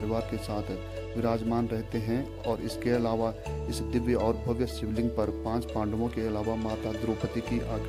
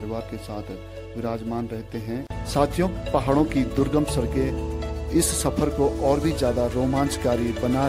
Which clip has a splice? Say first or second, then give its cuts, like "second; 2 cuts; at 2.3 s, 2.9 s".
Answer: second; 1 cut; at 2.3 s